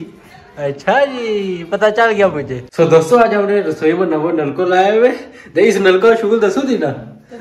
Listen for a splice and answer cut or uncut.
cut